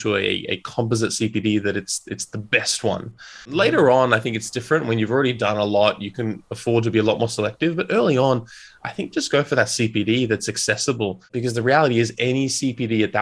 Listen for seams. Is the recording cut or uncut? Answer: cut